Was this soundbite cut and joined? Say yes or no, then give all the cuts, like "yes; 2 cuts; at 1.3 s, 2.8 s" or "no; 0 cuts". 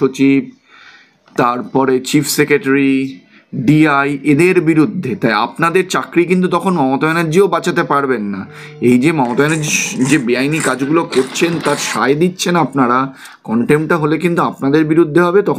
no; 0 cuts